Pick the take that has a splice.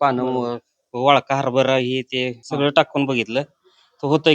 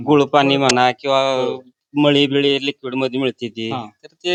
first; 1 cut; at 2.4 s

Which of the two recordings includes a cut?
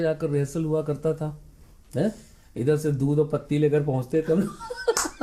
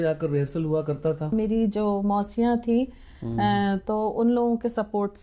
second; 1 cut; at 1.3 s

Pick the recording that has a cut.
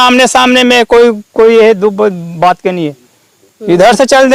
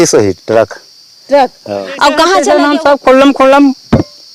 second; 1 cut; at 2.4 s

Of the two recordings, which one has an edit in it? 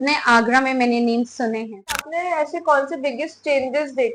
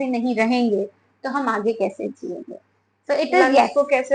first; 1 cut; at 2.1 s

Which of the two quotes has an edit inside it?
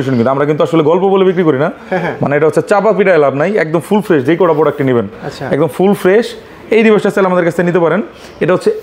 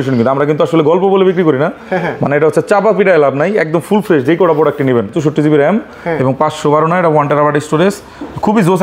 second; 1 cut; at 5.1 s

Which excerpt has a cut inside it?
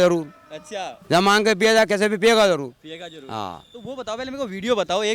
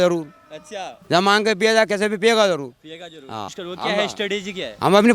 second; 1 cut; at 3.5 s

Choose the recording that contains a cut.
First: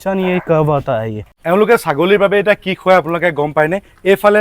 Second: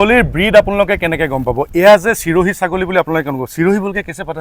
first; 1 cut; at 1.3 s

